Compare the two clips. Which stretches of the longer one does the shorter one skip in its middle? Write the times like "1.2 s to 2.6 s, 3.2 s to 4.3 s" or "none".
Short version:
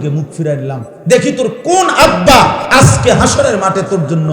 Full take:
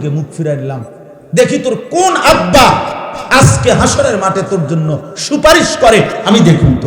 0.9 s to 1.2 s, 2.9 s to 3.2 s